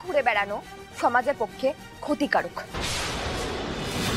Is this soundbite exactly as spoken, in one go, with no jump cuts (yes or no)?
no